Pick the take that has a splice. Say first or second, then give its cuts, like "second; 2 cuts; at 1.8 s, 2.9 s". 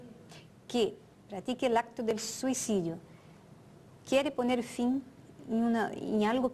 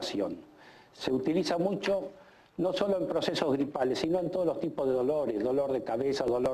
second; 1 cut; at 2.8 s